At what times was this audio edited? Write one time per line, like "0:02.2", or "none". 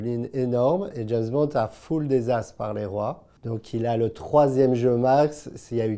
0:03.3